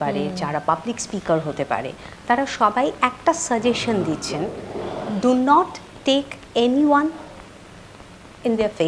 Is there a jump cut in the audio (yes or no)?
no